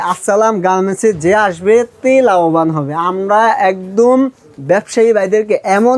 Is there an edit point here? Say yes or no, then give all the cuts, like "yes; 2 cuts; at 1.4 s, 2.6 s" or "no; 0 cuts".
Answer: no; 0 cuts